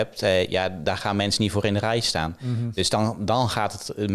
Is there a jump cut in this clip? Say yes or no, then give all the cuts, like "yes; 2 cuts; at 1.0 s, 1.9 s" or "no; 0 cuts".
no; 0 cuts